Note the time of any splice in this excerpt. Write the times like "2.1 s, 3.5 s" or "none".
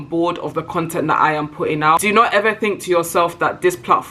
2.0 s